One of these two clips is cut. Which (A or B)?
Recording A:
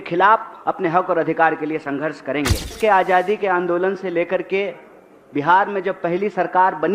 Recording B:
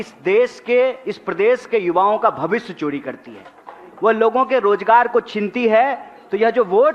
A